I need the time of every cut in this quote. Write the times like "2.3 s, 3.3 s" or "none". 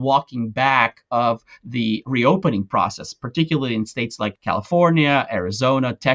2.0 s, 4.4 s